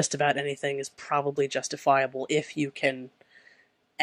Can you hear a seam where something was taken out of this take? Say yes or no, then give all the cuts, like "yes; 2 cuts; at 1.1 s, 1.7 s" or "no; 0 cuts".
no; 0 cuts